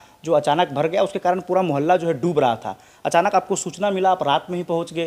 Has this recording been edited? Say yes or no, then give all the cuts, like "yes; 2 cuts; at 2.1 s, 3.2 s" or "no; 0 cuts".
no; 0 cuts